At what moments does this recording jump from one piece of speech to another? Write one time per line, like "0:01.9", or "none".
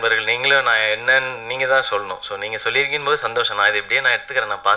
none